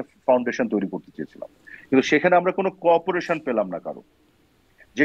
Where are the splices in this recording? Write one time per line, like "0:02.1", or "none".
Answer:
none